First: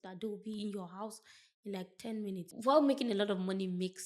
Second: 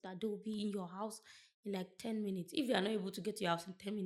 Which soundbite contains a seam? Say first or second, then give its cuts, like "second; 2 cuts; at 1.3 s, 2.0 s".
first; 1 cut; at 2.5 s